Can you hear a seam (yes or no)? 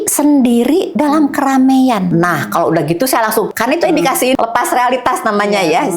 no